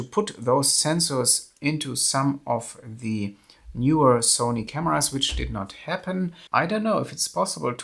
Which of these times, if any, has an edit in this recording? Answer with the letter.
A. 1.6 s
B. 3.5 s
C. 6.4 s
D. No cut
C